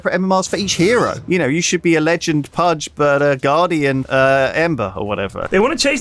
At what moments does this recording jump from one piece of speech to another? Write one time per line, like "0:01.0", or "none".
0:01.2
0:02.8
0:04.1
0:04.9